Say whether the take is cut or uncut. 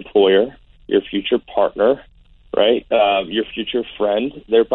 uncut